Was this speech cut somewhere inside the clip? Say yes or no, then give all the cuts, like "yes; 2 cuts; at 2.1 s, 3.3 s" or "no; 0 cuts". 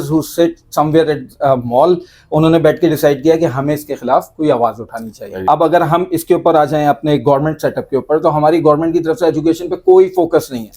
yes; 1 cut; at 5.3 s